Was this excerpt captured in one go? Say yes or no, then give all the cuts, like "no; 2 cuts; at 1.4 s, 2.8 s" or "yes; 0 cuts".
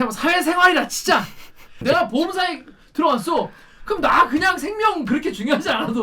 no; 1 cut; at 1.8 s